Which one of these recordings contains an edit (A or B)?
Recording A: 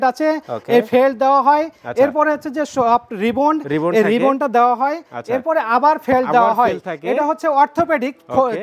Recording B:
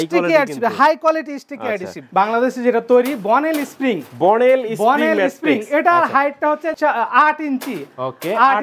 B